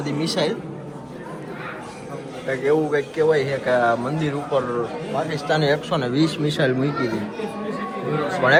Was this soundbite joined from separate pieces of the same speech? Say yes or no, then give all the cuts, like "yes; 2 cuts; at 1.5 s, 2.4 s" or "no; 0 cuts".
no; 0 cuts